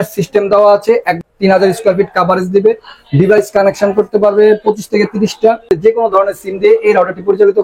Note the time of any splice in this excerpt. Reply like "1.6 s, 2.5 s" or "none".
1.3 s, 5.6 s